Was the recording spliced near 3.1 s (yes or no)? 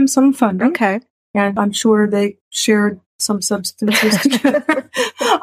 no